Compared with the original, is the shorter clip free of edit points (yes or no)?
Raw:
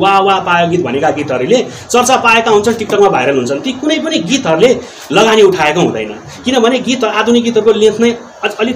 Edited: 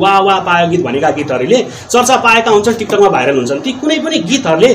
yes